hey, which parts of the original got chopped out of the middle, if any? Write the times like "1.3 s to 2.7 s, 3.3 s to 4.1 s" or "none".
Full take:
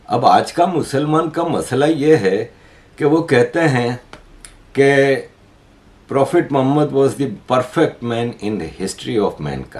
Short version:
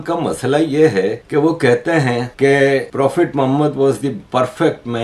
2.5 s to 2.9 s, 4.0 s to 4.6 s, 5.2 s to 6.0 s